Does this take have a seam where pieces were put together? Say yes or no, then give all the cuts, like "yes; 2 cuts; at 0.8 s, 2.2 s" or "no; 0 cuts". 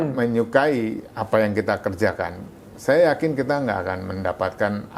no; 0 cuts